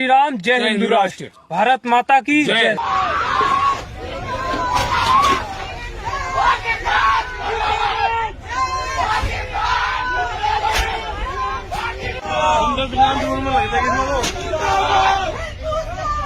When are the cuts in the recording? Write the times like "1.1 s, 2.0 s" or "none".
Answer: none